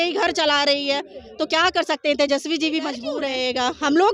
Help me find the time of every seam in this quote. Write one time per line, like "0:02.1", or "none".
0:03.1